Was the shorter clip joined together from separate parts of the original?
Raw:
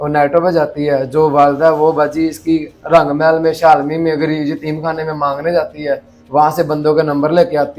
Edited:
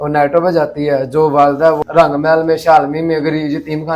yes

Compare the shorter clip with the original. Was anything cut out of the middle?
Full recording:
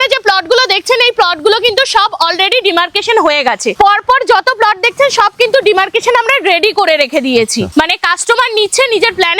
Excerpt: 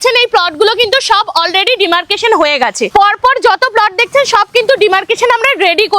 no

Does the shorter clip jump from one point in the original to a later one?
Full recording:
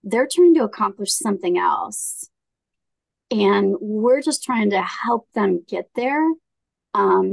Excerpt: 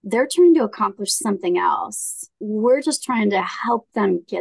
yes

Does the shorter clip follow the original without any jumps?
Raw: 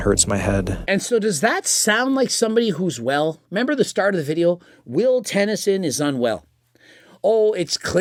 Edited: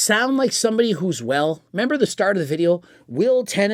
yes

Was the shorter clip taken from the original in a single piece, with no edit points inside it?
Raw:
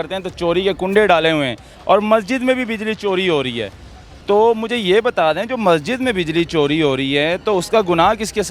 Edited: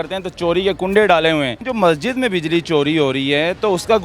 no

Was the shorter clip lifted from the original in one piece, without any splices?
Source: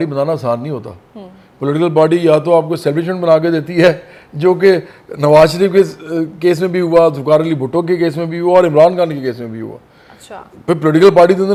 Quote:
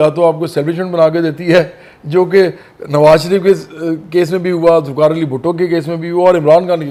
yes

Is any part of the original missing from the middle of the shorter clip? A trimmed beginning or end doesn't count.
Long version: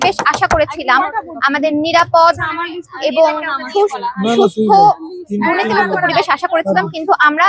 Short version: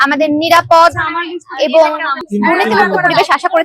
yes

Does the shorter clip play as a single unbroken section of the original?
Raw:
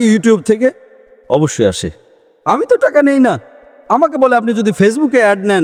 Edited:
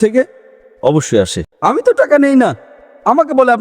no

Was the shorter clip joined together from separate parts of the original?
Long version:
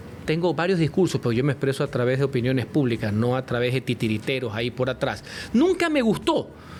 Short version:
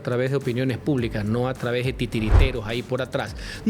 no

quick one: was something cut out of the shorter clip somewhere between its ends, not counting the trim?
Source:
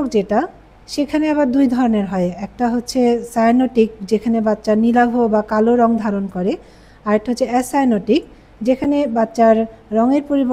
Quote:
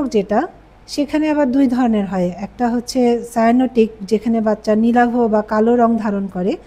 no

